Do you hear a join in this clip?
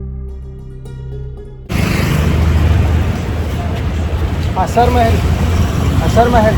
yes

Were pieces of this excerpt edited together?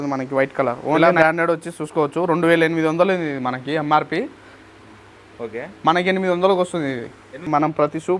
yes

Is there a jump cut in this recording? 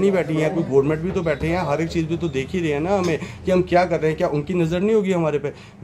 no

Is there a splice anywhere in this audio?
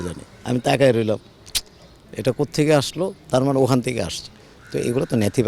no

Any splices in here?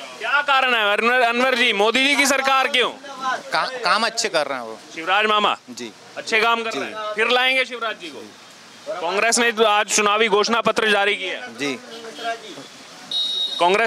no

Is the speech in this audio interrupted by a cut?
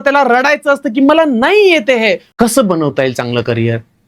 yes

